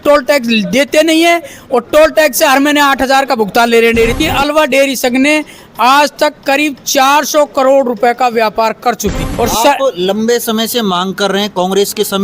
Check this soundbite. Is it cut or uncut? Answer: cut